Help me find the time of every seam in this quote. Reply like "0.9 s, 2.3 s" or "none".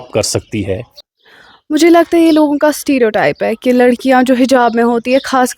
1.0 s